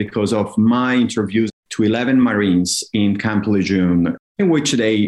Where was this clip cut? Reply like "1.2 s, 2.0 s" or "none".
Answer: 1.5 s, 4.2 s